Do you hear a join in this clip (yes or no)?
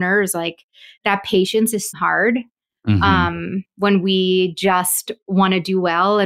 no